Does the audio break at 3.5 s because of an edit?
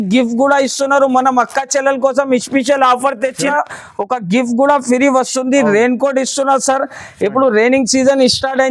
yes; 1 cut; at 3.5 s

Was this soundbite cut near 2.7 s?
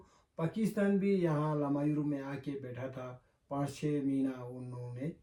no; 0 cuts

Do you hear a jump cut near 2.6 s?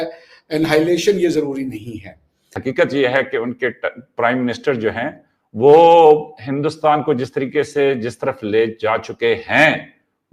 yes; 1 cut; at 2.6 s

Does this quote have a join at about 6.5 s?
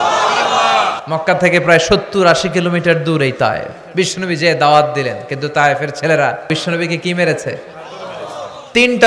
yes; 3 cuts; at 1.0 s, 3.8 s, 6.5 s

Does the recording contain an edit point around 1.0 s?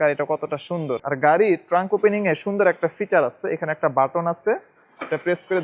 yes; 1 cut; at 1.0 s

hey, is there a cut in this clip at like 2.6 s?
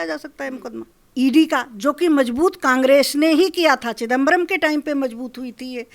no; 1 cut; at 1.0 s

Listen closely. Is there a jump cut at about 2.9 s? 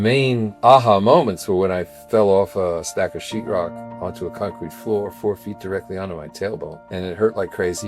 yes; 1 cut; at 2.9 s

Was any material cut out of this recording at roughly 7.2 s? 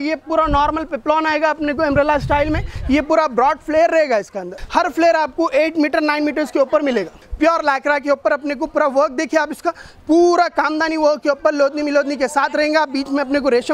yes; 2 cuts; at 4.6 s, 7.2 s

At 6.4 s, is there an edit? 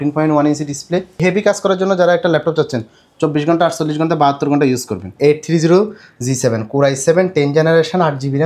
no; 2 cuts; at 1.2 s, 5.0 s

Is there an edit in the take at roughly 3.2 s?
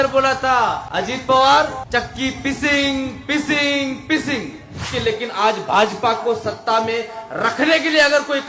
no; 3 cuts; at 0.8 s, 1.8 s, 4.9 s

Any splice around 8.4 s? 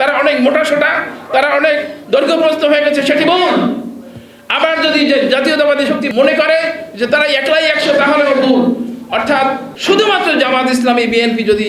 no; 2 cuts; at 6.1 s, 9.7 s

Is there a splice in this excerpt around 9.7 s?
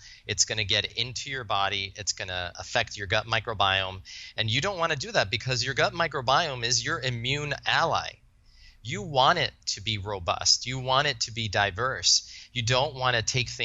no; 0 cuts

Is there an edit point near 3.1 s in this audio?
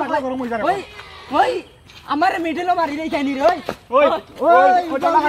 no; 0 cuts

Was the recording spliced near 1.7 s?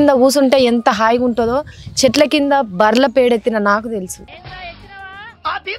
no; 0 cuts

